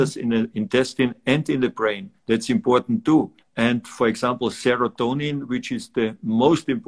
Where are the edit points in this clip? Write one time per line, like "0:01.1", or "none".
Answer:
0:02.1
0:03.4

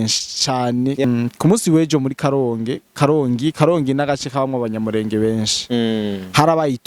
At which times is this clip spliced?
0:01.0

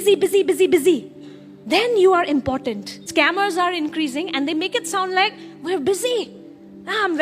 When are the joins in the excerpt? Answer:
0:02.9

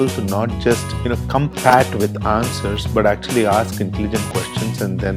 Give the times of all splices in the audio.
0:00.9

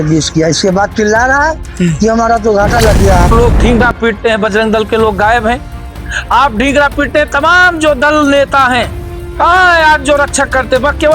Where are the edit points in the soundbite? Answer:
0:03.3

